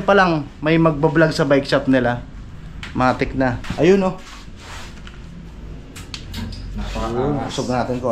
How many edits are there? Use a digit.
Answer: 0